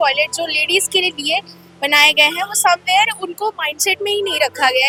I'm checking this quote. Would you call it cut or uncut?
uncut